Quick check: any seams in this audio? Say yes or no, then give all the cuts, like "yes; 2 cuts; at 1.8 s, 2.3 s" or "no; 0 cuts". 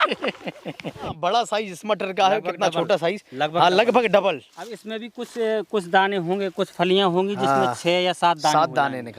yes; 1 cut; at 1.1 s